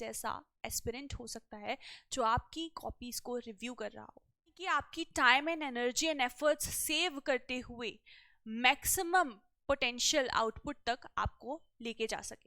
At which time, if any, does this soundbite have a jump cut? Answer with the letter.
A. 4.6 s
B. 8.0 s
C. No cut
A